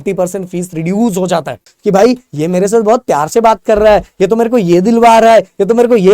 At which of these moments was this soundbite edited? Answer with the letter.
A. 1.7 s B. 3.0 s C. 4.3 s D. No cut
A